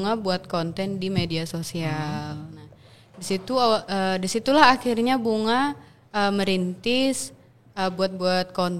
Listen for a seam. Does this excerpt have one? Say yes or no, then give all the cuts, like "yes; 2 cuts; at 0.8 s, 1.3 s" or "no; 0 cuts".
no; 0 cuts